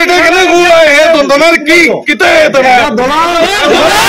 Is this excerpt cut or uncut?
uncut